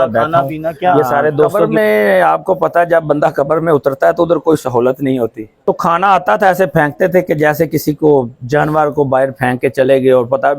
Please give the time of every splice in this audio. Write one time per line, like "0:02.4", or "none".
0:01.6
0:05.5